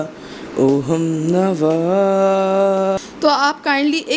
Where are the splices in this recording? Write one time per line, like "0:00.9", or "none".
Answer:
0:03.0